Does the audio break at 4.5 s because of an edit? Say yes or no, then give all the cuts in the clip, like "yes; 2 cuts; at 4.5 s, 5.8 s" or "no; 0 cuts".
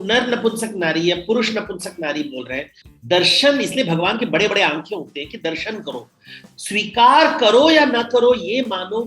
no; 1 cut; at 2.8 s